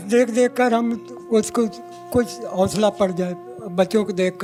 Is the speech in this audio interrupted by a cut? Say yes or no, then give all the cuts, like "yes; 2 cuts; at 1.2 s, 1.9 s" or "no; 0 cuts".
no; 0 cuts